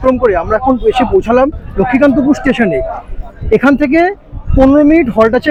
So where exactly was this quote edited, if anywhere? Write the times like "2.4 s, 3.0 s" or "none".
none